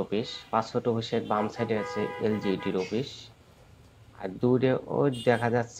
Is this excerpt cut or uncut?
uncut